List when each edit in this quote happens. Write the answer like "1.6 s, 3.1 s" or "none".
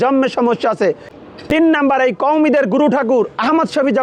1.1 s